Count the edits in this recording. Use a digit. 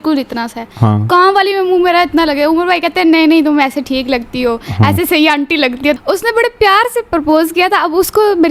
1